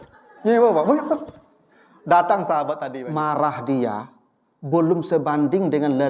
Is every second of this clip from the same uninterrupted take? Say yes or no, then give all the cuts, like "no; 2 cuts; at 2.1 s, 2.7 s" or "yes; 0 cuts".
no; 1 cut; at 2.9 s